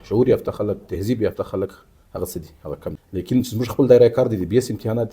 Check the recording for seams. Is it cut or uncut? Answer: cut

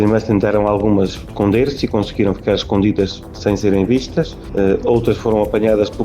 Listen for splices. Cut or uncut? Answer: cut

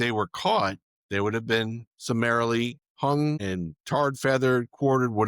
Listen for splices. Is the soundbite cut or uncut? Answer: cut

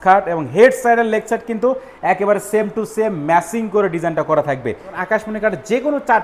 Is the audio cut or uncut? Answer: cut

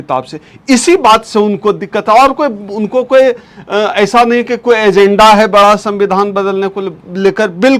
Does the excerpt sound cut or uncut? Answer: uncut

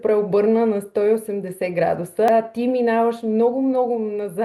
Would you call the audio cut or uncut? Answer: cut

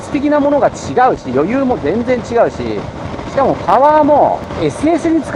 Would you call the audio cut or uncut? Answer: cut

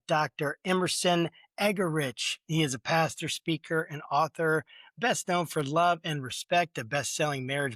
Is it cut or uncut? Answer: uncut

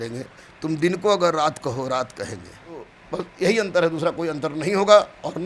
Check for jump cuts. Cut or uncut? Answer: cut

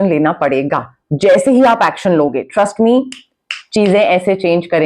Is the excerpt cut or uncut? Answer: uncut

